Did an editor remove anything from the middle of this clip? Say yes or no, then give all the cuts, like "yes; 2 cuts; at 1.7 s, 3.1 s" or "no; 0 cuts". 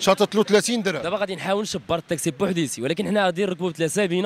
yes; 1 cut; at 1.0 s